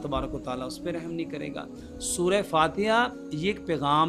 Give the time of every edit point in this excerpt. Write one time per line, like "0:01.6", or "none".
none

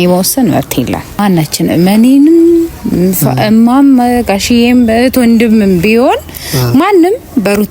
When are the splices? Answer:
0:01.2

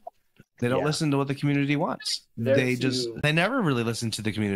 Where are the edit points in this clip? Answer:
0:03.2

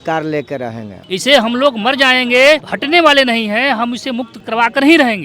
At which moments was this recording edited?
0:00.9
0:02.7
0:04.3

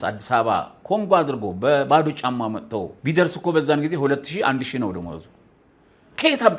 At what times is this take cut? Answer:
0:02.9

